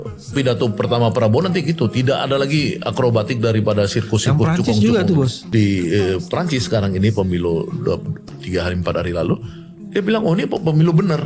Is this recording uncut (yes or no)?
no